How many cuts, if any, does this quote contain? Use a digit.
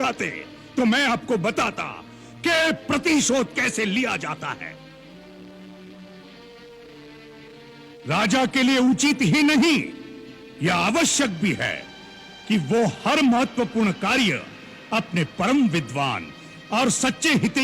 0